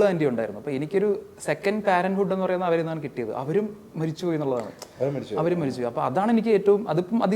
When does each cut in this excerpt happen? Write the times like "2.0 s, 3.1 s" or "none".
none